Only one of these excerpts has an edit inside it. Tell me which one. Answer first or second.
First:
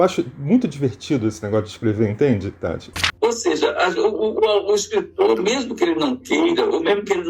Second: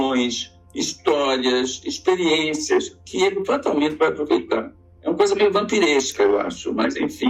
first